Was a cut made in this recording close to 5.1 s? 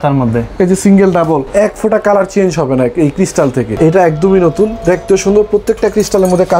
no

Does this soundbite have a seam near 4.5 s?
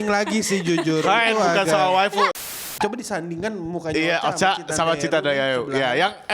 no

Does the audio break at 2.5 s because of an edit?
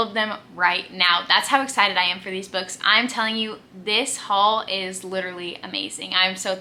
no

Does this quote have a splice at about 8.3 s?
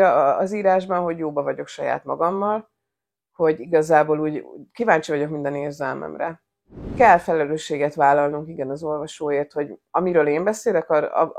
no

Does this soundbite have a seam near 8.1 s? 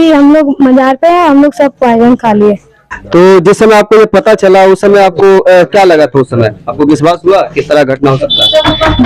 no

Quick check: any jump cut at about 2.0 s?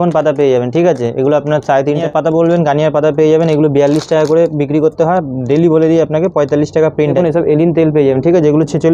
yes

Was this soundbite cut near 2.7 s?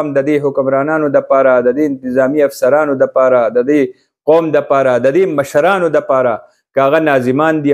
no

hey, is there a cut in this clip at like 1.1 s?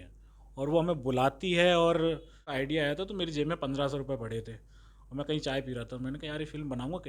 no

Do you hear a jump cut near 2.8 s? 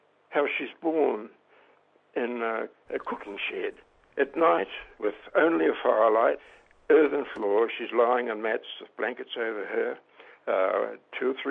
yes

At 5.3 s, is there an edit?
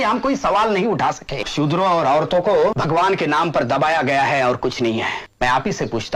yes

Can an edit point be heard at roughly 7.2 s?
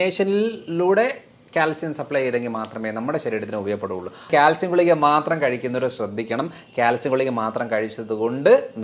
no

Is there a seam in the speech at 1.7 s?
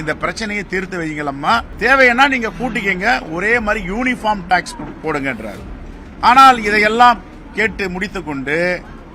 yes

